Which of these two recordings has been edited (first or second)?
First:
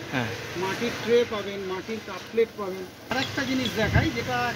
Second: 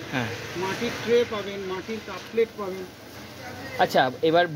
first